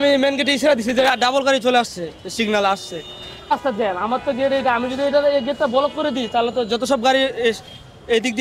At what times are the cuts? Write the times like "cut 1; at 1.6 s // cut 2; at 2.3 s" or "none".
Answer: cut 1; at 3.5 s